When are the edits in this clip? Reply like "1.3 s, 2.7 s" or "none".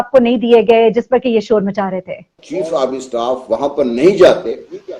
2.4 s